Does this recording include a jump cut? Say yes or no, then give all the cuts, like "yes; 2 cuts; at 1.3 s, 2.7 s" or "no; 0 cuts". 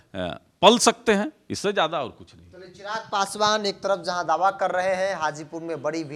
no; 0 cuts